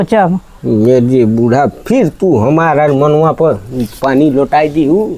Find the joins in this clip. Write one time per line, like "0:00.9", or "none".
none